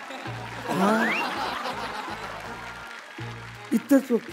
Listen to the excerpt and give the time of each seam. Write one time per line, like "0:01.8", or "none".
none